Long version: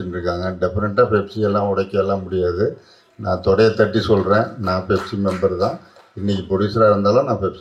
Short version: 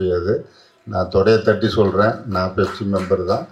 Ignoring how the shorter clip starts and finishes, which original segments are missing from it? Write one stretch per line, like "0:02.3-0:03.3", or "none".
none